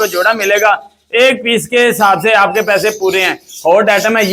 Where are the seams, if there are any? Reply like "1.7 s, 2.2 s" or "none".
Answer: none